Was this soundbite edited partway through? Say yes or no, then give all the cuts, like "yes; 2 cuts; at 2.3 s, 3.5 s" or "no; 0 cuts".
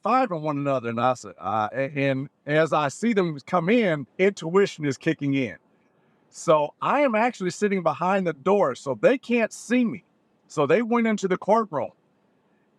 yes; 1 cut; at 4.0 s